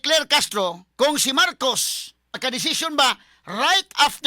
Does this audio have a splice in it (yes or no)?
yes